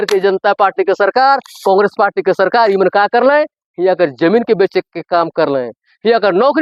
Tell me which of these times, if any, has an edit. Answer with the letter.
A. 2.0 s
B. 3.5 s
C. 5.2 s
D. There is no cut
D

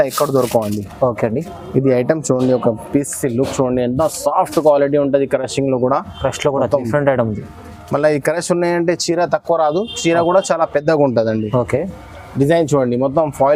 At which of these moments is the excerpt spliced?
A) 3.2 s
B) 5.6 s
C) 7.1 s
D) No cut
D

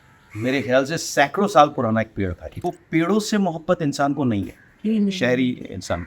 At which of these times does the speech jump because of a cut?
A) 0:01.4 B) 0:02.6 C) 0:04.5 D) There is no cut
B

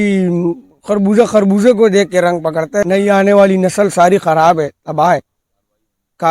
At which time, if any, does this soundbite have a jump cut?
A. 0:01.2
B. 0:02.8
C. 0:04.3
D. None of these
B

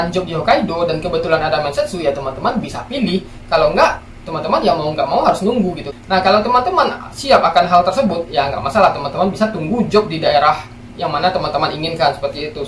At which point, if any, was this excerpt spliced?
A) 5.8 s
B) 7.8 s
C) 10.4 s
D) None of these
A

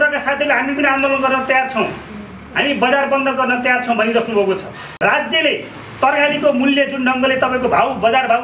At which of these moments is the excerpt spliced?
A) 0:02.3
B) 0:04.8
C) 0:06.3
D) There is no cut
B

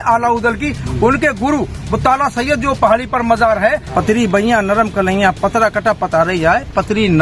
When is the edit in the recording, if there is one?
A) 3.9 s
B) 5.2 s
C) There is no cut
A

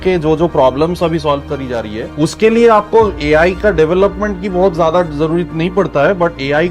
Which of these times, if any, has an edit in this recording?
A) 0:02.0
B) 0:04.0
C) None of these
A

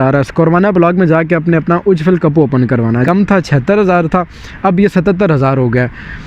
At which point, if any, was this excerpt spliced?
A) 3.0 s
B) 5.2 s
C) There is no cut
A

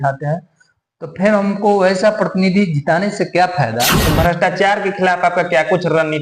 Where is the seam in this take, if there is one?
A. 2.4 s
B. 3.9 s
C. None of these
B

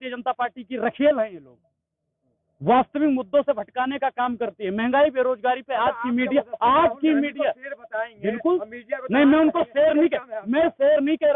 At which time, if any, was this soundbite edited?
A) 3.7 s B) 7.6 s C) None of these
C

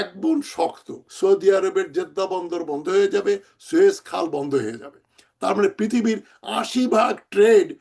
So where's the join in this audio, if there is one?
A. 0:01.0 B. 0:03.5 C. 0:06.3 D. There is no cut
A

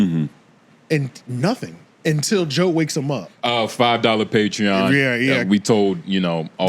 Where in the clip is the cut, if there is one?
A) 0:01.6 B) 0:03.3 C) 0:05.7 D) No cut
B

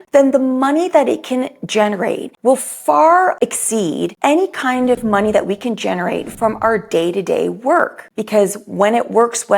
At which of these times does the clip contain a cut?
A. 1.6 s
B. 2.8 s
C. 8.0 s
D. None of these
C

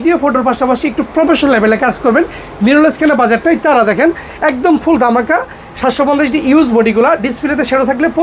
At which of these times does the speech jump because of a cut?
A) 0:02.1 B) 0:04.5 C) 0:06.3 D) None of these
D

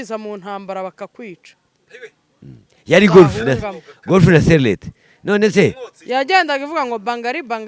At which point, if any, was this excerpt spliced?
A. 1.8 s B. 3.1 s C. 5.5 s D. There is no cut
D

